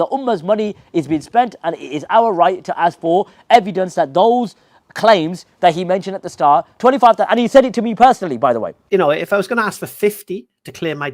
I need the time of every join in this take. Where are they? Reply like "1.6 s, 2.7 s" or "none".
8.8 s